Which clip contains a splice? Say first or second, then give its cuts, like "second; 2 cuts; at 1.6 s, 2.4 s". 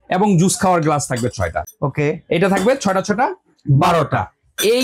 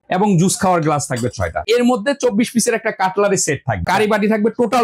second; 2 cuts; at 1.6 s, 3.9 s